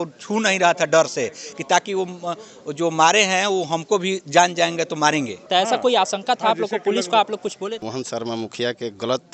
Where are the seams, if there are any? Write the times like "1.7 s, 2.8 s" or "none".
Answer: 5.4 s, 7.8 s